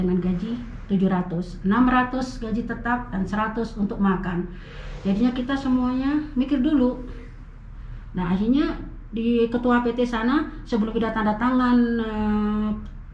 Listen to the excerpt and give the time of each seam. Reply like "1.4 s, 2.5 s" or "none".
none